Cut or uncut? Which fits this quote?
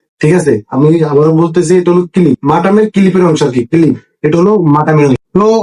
uncut